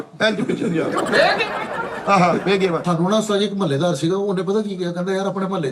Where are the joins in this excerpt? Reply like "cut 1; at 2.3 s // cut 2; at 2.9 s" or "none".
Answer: cut 1; at 2.8 s